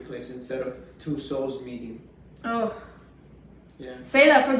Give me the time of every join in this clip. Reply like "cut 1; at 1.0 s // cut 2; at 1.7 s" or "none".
none